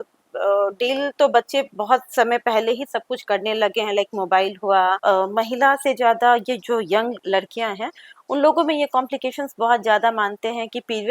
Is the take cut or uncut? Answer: cut